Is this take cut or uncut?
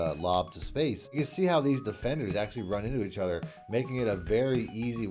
cut